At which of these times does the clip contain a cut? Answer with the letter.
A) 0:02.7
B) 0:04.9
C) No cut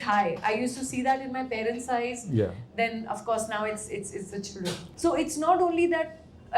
B